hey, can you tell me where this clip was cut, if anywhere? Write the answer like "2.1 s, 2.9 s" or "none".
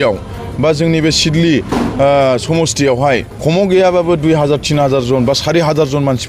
3.3 s